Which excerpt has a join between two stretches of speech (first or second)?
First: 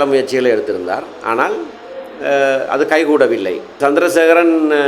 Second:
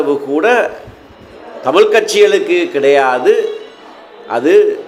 first